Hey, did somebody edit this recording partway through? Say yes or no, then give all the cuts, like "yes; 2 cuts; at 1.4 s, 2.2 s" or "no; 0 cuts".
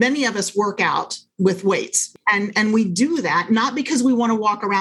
yes; 2 cuts; at 1.3 s, 2.0 s